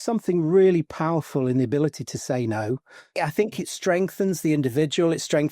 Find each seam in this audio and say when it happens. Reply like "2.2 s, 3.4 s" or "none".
3.1 s

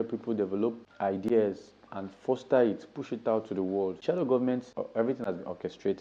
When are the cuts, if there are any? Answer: 4.7 s

